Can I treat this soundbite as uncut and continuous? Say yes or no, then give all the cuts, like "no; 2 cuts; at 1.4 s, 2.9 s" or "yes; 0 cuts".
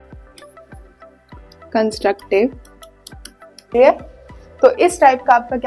no; 1 cut; at 3.5 s